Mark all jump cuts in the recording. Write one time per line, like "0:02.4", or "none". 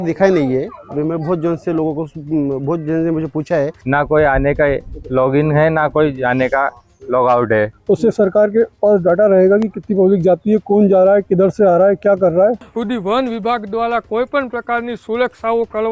0:03.8
0:07.8
0:12.7